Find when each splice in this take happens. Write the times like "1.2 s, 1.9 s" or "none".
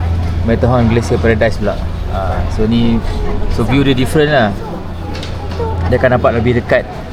none